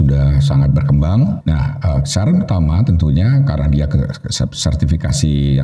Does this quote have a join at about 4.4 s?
no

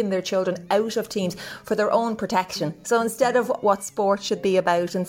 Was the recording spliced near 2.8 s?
yes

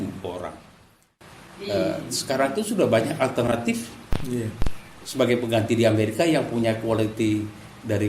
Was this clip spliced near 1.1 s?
yes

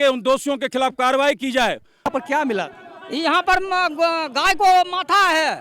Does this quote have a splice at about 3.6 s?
no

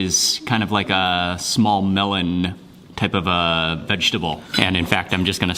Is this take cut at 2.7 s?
no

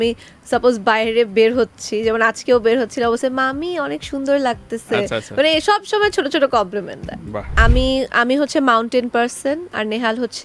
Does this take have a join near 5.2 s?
no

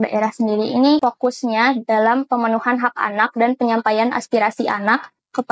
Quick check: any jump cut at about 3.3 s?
no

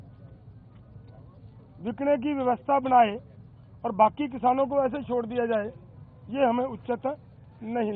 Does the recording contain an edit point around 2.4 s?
no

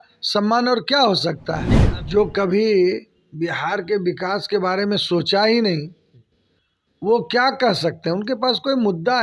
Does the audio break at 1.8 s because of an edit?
yes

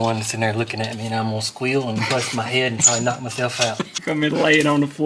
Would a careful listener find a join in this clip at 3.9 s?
yes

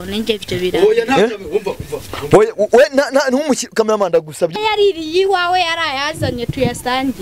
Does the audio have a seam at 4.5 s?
yes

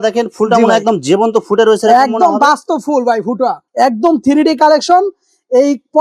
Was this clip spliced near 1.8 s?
no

